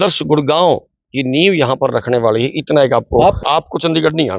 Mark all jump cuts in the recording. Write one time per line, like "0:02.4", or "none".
0:03.4